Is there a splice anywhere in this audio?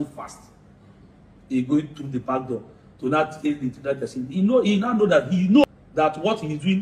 yes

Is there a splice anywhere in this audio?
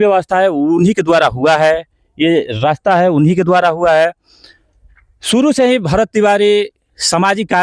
no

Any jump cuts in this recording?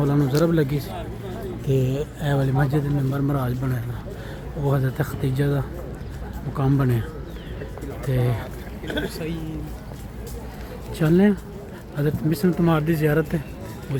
no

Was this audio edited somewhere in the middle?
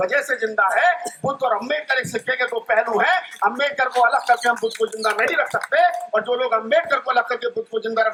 no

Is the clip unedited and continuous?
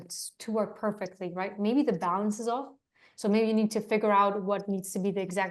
yes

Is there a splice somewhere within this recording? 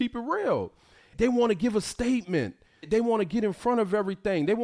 yes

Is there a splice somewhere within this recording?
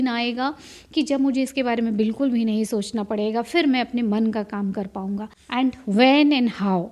yes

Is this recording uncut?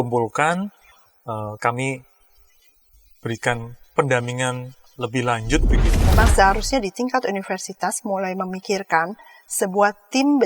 no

